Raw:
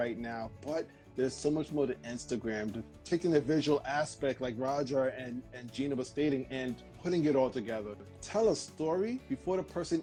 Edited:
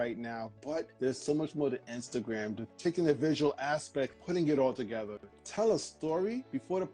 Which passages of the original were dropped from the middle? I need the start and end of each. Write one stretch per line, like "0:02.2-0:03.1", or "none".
0:00.9-0:01.1
0:02.8-0:02.9
0:04.4-0:06.9